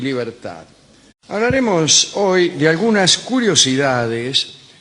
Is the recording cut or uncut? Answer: uncut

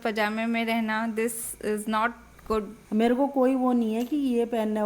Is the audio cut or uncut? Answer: cut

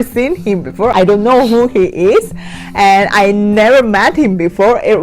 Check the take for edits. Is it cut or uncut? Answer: cut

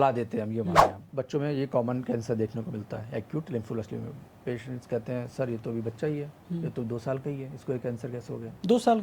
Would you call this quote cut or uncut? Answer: cut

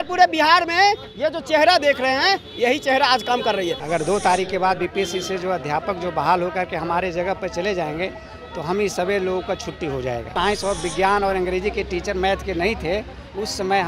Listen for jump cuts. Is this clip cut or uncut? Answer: cut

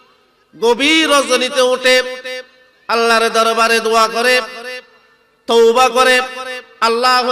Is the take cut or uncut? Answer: uncut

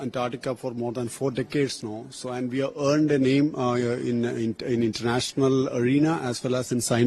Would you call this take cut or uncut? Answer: uncut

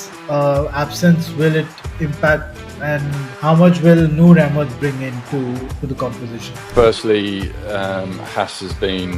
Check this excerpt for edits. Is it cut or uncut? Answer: cut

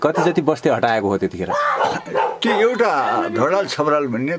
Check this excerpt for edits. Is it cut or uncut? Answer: uncut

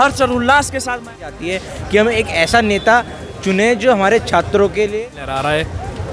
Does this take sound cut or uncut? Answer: cut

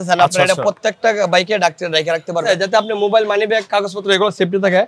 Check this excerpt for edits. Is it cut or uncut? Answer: cut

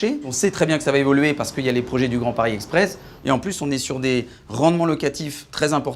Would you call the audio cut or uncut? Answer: uncut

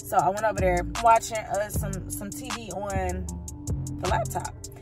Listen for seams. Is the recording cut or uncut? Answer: cut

